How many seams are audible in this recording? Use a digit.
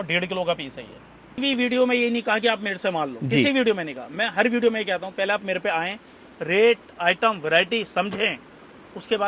1